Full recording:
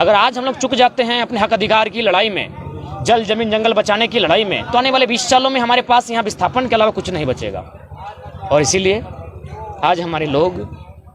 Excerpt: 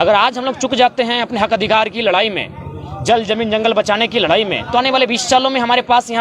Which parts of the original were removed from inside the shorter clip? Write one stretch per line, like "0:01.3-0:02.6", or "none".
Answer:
none